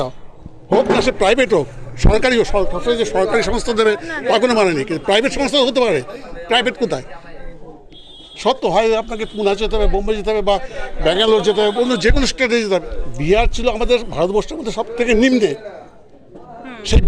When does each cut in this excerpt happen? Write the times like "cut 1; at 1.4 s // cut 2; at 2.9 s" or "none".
cut 1; at 13.0 s

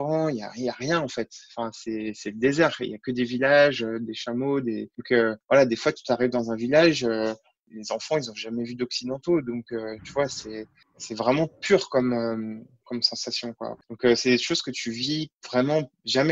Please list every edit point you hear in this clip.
cut 1; at 12.7 s // cut 2; at 13.9 s // cut 3; at 15.4 s

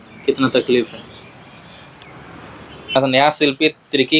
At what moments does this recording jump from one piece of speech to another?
cut 1; at 2.9 s

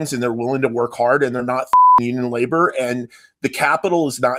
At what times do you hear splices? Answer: none

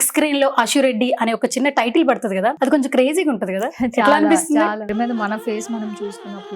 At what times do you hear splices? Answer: cut 1; at 2.6 s // cut 2; at 4.9 s

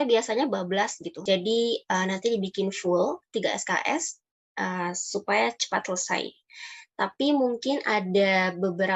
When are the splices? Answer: cut 1; at 1.1 s

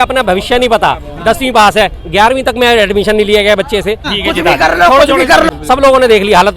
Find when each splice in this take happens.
cut 1; at 4.1 s // cut 2; at 5.5 s

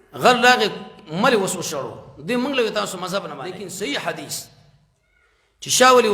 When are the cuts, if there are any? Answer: cut 1; at 3.4 s

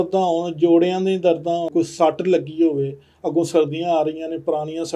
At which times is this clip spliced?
cut 1; at 1.7 s

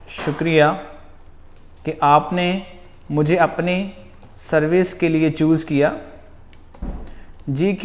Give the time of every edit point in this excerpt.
none

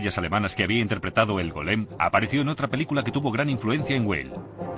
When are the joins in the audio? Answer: cut 1; at 2.6 s

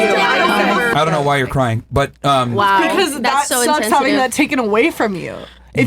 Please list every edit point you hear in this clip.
cut 1; at 0.9 s

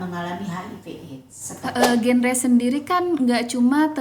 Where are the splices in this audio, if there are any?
cut 1; at 1.4 s

